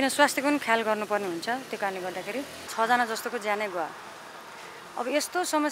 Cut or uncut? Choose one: cut